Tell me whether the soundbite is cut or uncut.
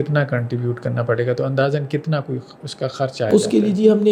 uncut